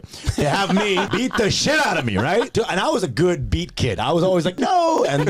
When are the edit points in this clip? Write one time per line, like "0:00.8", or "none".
0:01.1
0:02.5